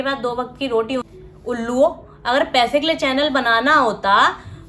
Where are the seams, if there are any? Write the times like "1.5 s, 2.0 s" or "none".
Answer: 1.1 s